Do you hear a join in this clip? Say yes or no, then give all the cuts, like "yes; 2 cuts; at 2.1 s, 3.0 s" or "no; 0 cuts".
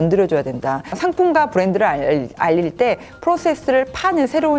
no; 0 cuts